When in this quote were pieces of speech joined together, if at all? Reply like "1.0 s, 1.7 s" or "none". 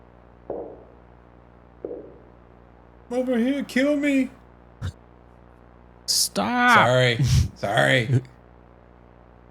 5.4 s